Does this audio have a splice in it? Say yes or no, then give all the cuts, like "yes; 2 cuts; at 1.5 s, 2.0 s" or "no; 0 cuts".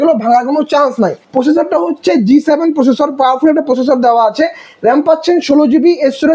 yes; 1 cut; at 1.2 s